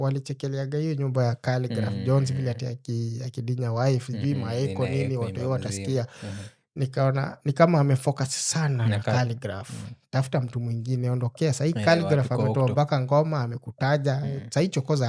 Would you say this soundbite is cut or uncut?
uncut